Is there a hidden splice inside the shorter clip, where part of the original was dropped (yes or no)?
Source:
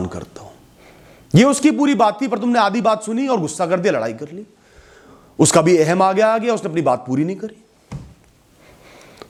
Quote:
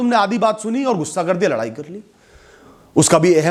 no